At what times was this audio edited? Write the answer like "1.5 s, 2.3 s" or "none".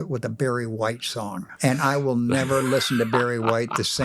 1.5 s